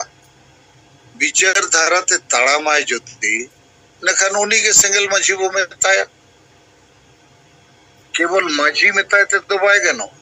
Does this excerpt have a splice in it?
no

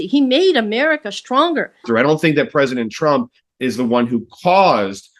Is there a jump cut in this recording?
yes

